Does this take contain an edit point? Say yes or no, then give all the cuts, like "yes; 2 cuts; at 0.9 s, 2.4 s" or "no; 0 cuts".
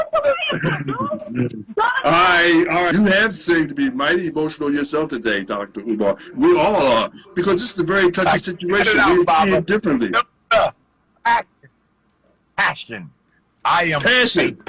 yes; 1 cut; at 2.9 s